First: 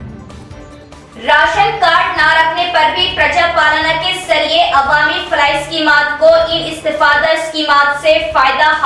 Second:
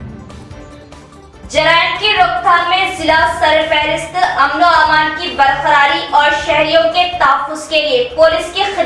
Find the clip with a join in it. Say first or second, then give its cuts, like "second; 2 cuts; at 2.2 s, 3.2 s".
first; 1 cut; at 1.0 s